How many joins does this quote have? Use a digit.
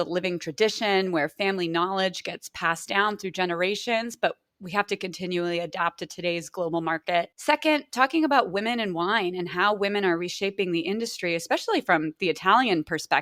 0